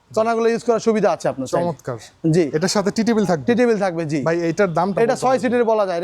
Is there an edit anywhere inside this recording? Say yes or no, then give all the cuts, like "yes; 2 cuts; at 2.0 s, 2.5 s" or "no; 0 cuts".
no; 0 cuts